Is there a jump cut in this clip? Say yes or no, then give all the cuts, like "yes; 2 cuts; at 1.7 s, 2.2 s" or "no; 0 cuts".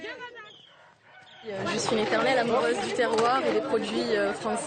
yes; 1 cut; at 3.7 s